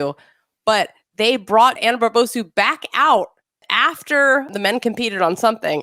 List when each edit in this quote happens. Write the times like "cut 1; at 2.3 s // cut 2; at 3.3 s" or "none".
cut 1; at 1.8 s // cut 2; at 3.6 s // cut 3; at 4.5 s